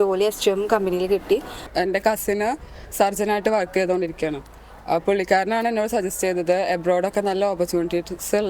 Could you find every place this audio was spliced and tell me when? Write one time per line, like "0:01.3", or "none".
0:01.7